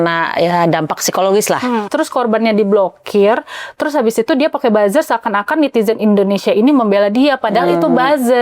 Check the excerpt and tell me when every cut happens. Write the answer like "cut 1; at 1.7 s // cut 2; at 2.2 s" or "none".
cut 1; at 1.9 s

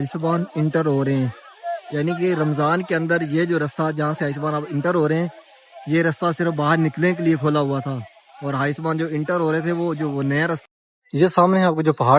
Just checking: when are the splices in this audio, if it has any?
cut 1; at 10.6 s

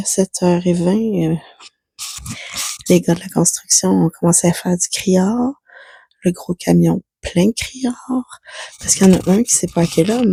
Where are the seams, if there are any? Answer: none

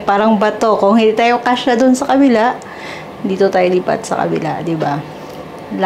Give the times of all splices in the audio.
none

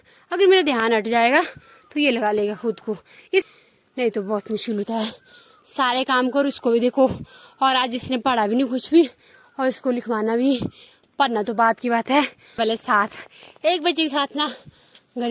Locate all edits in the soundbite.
cut 1; at 3.4 s // cut 2; at 12.6 s

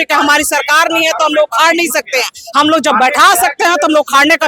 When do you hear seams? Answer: none

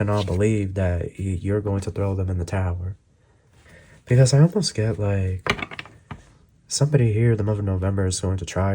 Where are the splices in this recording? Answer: cut 1; at 3.6 s

